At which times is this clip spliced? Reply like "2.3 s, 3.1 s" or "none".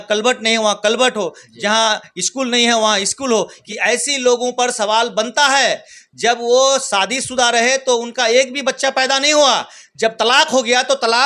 3.6 s